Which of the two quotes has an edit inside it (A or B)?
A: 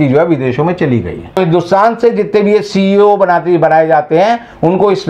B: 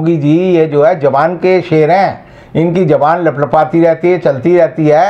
A